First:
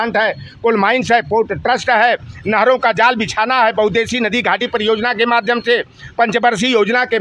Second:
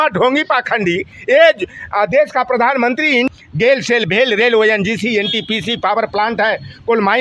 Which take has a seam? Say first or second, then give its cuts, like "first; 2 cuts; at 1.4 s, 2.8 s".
second; 1 cut; at 3.3 s